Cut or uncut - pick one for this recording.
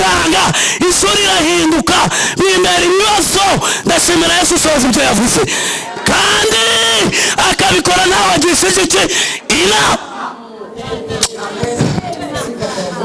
uncut